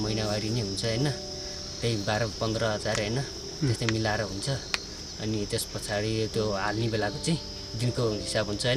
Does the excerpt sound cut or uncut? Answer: uncut